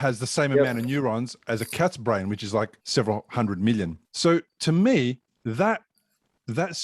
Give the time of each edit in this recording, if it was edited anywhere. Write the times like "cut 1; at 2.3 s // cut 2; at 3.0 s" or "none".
cut 1; at 2.8 s // cut 2; at 4.0 s